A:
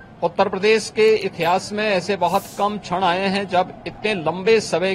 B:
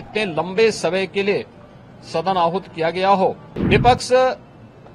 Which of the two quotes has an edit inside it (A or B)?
B